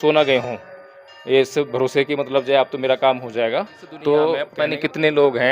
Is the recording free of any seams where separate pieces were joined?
no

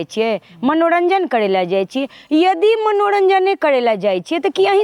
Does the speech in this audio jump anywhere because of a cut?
no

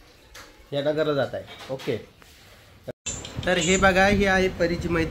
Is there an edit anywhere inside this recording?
yes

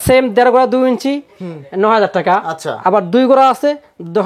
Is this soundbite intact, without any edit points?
yes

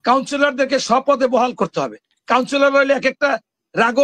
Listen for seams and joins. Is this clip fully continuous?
yes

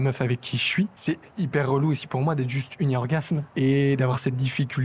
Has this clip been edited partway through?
yes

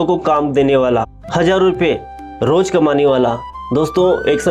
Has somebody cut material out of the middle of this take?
no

